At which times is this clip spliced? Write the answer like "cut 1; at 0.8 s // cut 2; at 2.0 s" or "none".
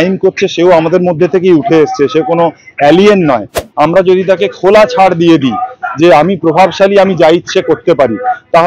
cut 1; at 3.6 s